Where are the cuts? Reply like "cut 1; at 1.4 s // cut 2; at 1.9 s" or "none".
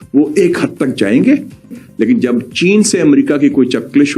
cut 1; at 1.8 s